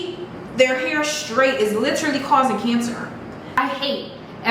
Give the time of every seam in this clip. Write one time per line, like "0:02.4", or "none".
0:03.6